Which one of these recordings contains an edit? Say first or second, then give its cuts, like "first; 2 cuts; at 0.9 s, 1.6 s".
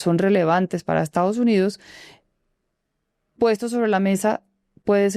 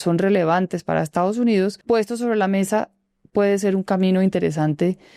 second; 1 cut; at 1.8 s